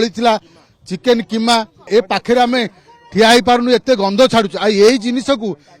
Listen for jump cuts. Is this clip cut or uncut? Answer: cut